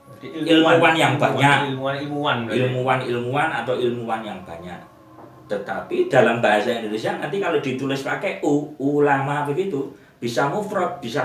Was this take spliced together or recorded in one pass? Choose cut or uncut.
uncut